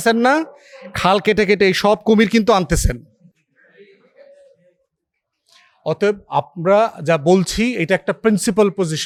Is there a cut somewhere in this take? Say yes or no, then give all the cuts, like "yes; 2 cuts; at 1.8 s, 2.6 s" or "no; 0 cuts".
no; 0 cuts